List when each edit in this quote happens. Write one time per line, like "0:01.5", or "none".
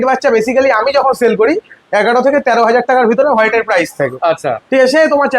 none